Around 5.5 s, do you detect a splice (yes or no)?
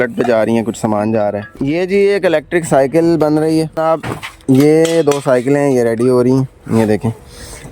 no